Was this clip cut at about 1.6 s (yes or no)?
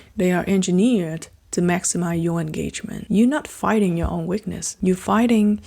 no